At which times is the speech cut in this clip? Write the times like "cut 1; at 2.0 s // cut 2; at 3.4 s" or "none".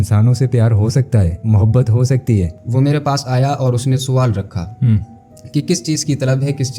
cut 1; at 2.6 s